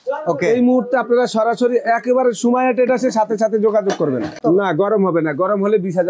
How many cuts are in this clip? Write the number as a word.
one